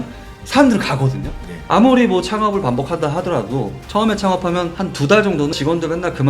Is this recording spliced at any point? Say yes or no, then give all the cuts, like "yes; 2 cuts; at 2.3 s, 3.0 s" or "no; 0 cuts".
yes; 1 cut; at 1.5 s